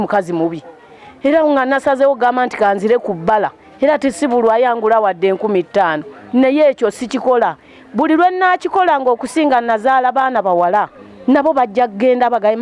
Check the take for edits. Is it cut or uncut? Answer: uncut